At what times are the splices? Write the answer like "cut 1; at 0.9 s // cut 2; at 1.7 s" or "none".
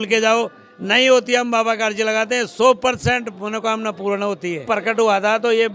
cut 1; at 4.7 s

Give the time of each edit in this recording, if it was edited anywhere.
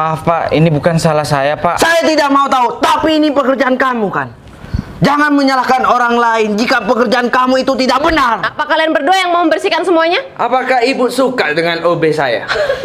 cut 1; at 8.6 s

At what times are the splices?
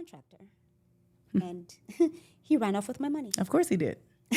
none

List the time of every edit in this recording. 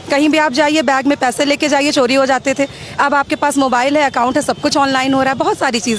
none

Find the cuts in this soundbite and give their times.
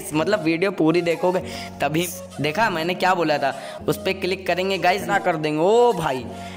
cut 1; at 2.1 s // cut 2; at 5.0 s

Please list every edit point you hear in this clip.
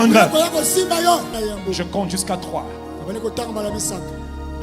cut 1; at 1.3 s

